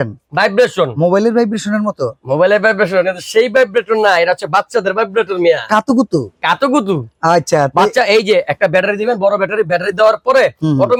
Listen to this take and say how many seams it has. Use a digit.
0